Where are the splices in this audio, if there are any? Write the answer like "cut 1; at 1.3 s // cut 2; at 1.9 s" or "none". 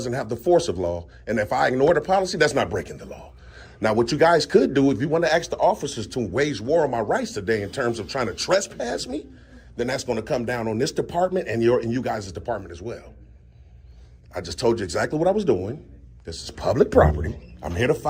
none